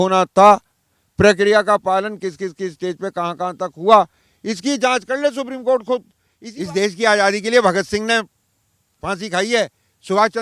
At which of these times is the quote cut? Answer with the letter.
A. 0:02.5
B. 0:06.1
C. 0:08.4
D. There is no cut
B